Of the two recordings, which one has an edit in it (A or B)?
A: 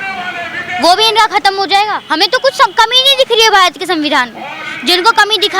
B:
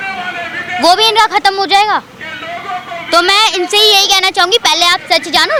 A